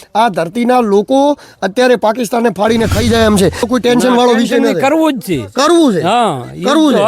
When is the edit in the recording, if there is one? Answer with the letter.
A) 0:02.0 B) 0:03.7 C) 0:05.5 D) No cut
B